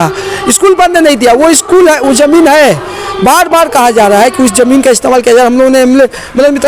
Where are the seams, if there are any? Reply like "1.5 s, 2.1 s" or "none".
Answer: none